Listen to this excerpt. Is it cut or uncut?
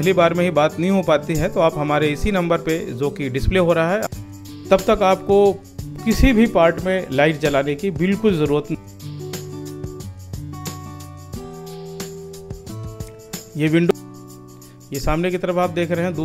cut